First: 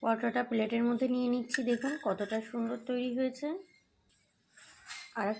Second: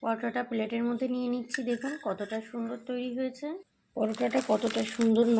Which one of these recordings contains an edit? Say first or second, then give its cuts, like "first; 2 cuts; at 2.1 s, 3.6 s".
second; 1 cut; at 3.7 s